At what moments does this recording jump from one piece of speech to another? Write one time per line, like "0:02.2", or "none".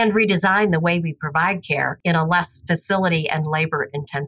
none

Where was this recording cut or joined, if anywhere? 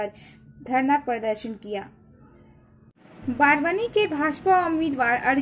0:03.1

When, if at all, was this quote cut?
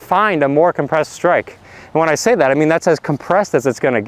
none

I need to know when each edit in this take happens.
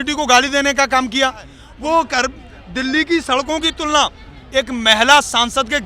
0:01.6

